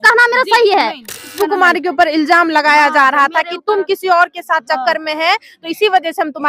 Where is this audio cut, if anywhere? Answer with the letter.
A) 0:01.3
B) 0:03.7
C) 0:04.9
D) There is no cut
A